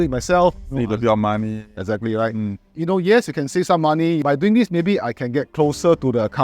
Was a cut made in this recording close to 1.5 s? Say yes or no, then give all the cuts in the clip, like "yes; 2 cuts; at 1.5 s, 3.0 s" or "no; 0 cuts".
no; 2 cuts; at 2.7 s, 4.2 s